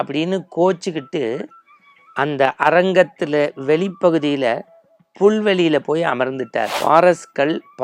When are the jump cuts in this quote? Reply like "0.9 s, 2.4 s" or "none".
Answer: 6.7 s